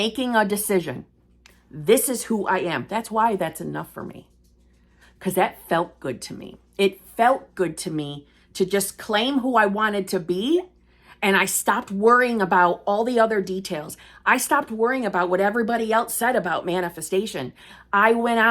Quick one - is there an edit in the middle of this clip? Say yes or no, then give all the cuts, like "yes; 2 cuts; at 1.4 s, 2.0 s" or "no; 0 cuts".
no; 0 cuts